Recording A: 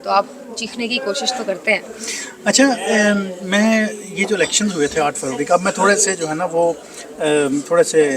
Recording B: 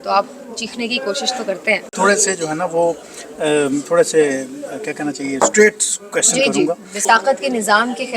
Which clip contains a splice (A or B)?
B